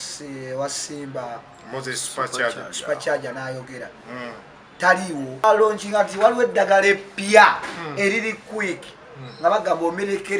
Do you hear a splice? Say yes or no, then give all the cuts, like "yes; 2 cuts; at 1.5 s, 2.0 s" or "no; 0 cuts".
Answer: yes; 1 cut; at 5.4 s